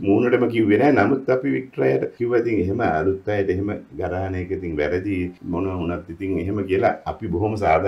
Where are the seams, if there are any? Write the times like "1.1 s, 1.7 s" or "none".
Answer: 2.1 s, 5.4 s